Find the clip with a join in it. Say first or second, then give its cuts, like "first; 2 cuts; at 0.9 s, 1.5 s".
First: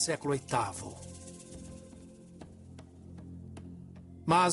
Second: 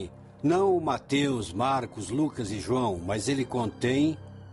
second; 1 cut; at 1.0 s